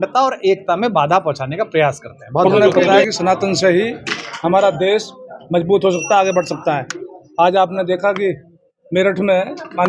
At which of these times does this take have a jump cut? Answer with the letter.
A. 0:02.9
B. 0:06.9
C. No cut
A